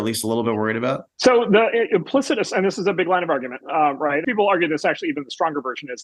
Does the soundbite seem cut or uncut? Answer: cut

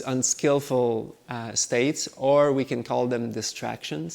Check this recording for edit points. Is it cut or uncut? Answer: uncut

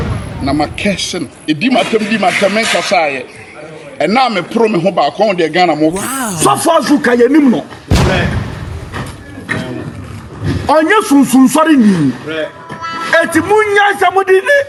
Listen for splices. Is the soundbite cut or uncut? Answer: uncut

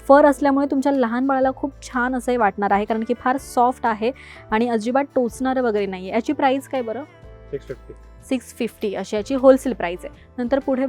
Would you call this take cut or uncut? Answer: uncut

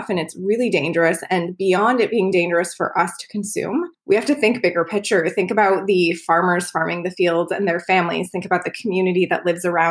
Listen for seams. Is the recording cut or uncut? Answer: cut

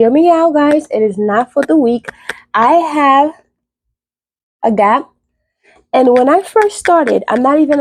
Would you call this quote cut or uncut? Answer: uncut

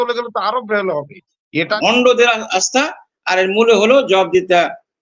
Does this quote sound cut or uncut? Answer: cut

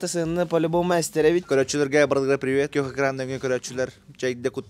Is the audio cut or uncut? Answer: cut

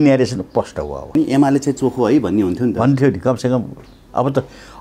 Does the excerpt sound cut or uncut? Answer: cut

